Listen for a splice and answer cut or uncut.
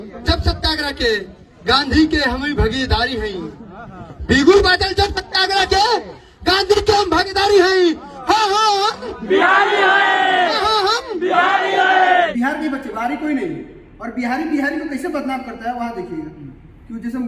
cut